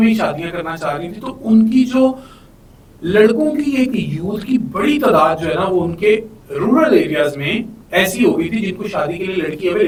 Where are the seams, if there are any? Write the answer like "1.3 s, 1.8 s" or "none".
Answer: none